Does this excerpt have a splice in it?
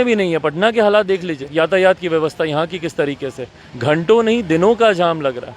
yes; 1 cut; at 1.4 s

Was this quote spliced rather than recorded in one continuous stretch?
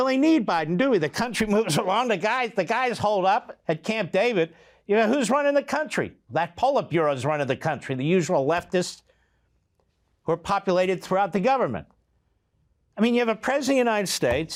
no; 0 cuts

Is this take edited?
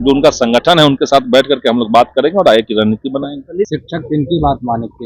yes; 1 cut; at 3.7 s

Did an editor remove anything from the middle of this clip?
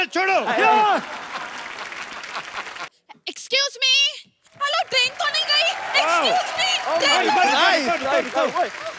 yes; 1 cut; at 2.8 s

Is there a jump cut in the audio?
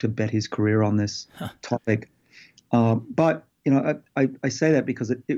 no; 0 cuts

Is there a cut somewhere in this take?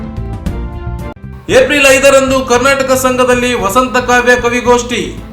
yes; 1 cut; at 1.2 s

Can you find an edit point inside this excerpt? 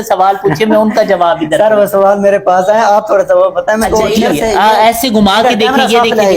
yes; 1 cut; at 3.9 s

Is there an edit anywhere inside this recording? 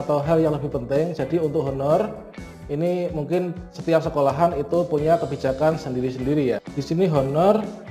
yes; 1 cut; at 6.7 s

